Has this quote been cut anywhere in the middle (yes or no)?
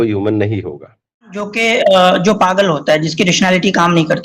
yes